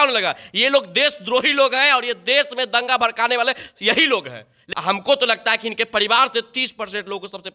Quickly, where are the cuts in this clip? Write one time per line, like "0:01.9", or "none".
0:04.6